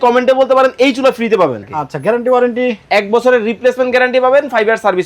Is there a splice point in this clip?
yes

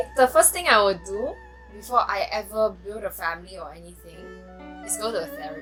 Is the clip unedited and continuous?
yes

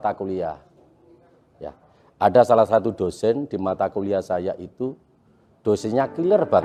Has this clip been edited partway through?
no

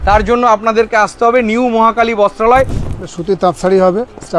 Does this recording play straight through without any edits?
no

